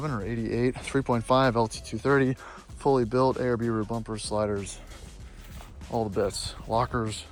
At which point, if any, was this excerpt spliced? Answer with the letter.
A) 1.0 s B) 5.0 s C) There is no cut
C